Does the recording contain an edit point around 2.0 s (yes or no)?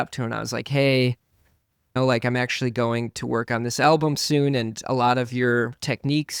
yes